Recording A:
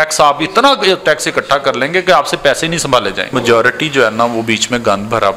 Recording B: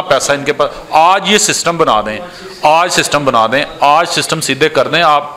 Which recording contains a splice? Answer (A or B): A